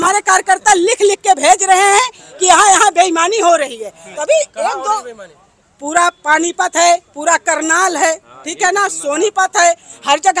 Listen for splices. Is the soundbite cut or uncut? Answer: uncut